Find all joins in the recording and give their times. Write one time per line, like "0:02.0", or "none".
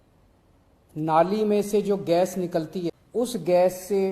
0:03.0